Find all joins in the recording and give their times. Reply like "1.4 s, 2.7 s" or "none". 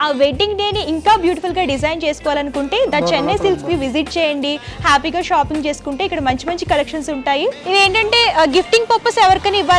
7.6 s